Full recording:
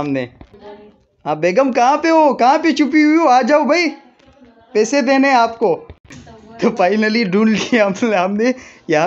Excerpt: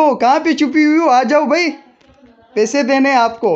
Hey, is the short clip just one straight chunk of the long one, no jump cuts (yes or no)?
yes